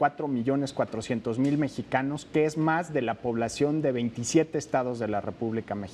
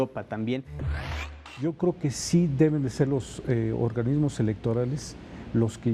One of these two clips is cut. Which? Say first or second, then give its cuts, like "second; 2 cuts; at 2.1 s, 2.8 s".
second; 1 cut; at 1.0 s